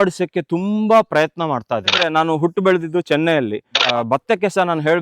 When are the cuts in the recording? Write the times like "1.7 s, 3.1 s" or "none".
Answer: 2.0 s, 3.8 s